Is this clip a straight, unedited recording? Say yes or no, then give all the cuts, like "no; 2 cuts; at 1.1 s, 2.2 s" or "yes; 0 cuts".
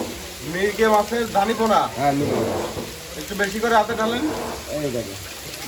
yes; 0 cuts